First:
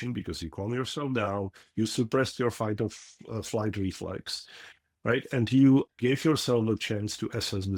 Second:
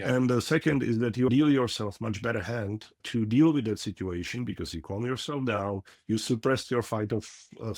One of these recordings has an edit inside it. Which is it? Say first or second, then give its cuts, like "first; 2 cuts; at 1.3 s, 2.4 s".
second; 2 cuts; at 1.3 s, 3.0 s